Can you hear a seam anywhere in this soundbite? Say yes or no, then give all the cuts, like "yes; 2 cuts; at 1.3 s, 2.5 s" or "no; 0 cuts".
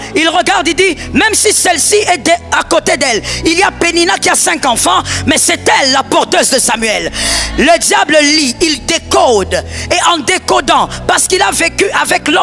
no; 0 cuts